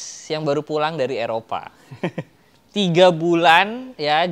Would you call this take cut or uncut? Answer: uncut